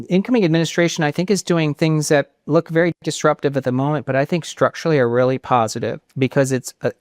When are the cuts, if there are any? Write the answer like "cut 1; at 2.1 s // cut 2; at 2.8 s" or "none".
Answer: cut 1; at 6.0 s